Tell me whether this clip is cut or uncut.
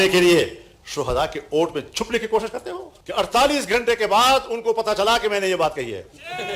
cut